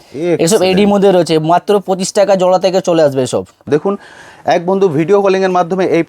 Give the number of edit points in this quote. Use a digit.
1